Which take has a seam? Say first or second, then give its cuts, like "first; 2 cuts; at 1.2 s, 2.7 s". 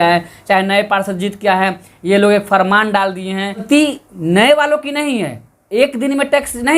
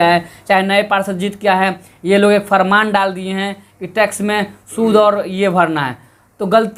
first; 1 cut; at 3.6 s